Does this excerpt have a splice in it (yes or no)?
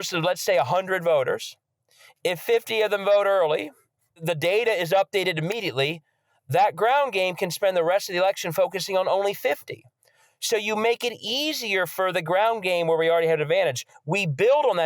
yes